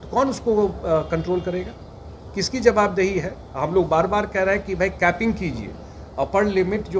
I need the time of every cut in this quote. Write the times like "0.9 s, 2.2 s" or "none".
none